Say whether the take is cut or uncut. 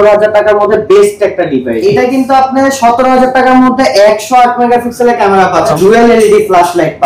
cut